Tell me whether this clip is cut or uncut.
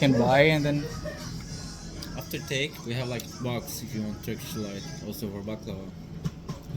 uncut